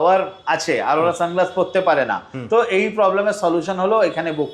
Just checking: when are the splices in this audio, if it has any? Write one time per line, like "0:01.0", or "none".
none